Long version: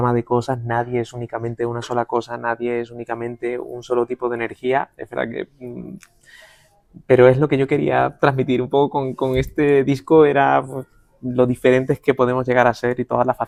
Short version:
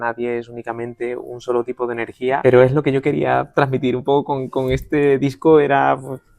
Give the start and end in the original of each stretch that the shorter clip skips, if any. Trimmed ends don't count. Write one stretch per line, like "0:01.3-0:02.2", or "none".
0:04.8-0:07.1